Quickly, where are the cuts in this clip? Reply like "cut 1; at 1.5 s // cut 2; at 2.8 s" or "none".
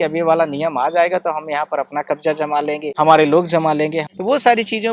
cut 1; at 2.9 s // cut 2; at 4.0 s